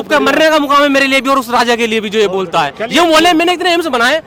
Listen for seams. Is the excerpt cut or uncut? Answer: uncut